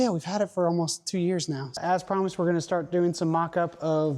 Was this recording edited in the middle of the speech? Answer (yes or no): yes